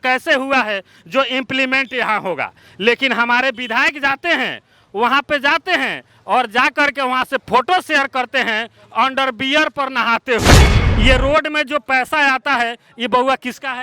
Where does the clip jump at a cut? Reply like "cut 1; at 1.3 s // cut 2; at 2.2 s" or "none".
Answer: cut 1; at 10.8 s